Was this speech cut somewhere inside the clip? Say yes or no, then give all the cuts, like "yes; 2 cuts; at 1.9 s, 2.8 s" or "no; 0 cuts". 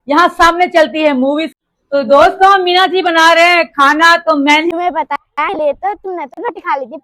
yes; 2 cuts; at 1.5 s, 4.7 s